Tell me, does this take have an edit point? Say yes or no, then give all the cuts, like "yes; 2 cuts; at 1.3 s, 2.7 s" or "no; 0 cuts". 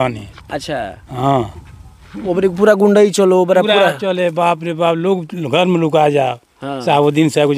no; 0 cuts